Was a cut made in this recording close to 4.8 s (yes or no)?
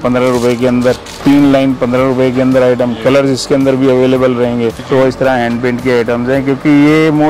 yes